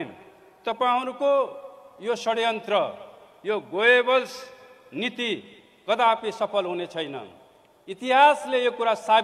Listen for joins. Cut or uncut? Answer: uncut